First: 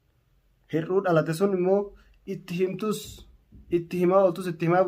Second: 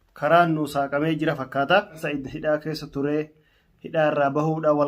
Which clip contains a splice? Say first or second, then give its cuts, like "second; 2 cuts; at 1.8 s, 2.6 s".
second; 1 cut; at 2.2 s